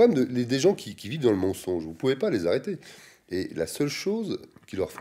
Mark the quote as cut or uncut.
uncut